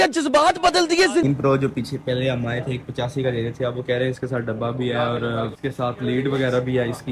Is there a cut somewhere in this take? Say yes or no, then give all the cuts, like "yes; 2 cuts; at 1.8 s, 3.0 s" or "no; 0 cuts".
yes; 1 cut; at 1.2 s